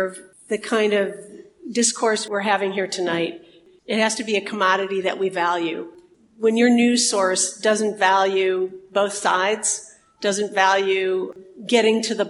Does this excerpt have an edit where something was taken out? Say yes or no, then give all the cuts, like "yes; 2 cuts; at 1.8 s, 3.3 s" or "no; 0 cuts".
yes; 2 cuts; at 2.2 s, 3.6 s